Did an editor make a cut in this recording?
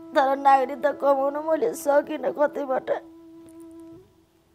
no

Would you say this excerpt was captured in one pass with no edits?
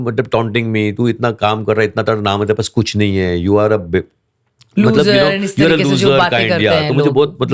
yes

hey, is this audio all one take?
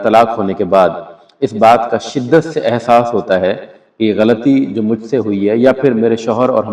yes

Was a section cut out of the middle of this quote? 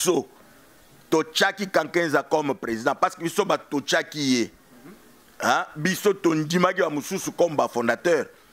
no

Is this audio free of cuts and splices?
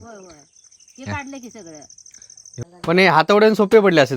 no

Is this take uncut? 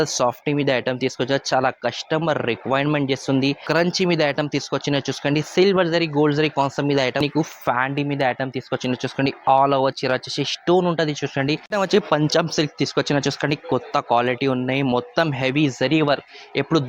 no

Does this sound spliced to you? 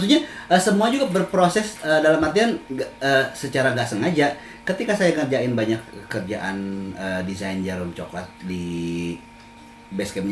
no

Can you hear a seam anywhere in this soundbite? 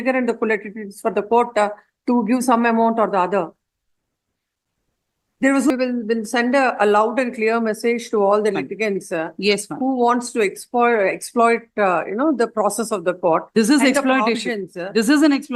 yes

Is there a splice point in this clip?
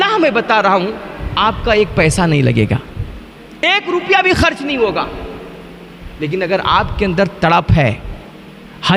no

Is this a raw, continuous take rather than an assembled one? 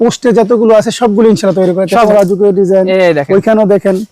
no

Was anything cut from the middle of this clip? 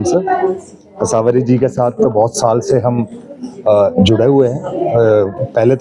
no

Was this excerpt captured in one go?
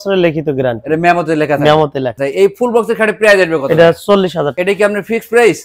yes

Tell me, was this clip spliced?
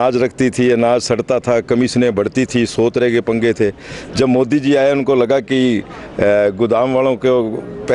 no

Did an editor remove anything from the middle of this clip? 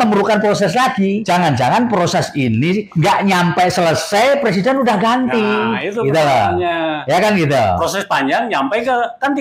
no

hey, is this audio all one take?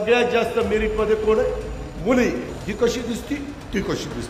no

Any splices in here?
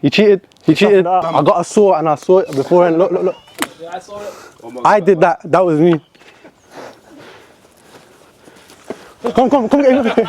yes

